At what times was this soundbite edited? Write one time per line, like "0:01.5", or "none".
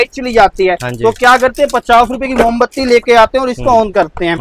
none

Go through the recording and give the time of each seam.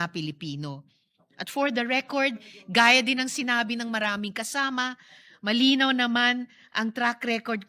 none

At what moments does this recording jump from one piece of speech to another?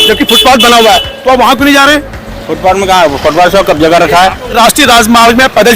0:04.6

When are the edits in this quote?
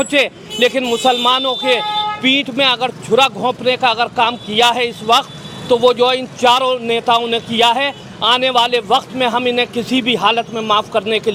none

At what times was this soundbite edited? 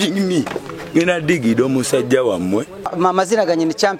0:03.0

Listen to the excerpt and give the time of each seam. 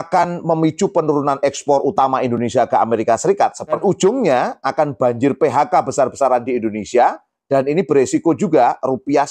0:03.8

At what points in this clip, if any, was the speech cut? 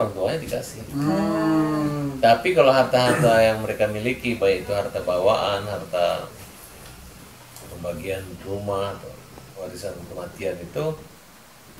none

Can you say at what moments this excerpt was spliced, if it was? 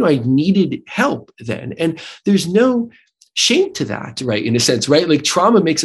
none

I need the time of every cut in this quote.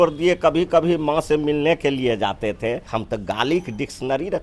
0:02.9

